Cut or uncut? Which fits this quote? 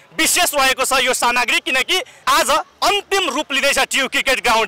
uncut